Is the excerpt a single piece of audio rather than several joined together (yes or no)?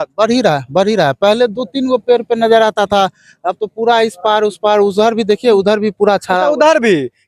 yes